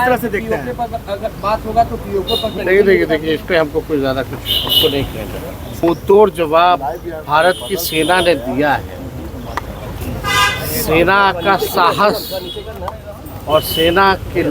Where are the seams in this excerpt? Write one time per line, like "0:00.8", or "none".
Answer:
0:02.6
0:05.8